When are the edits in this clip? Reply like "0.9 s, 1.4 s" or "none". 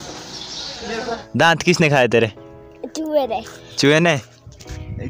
1.2 s